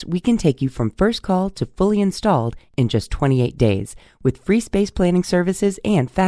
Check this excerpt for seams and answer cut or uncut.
uncut